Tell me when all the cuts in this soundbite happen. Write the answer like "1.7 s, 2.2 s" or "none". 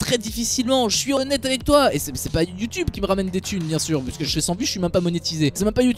1.2 s, 2.9 s, 4.4 s